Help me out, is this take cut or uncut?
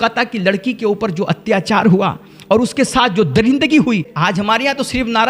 cut